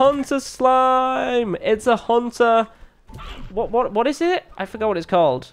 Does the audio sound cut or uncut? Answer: uncut